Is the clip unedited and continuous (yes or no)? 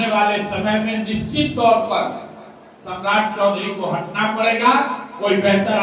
yes